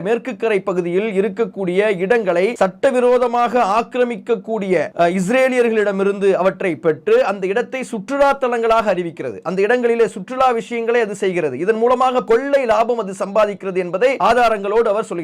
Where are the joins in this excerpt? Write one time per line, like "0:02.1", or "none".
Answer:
0:02.5
0:04.9
0:12.2
0:14.2